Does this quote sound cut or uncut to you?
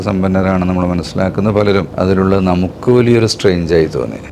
cut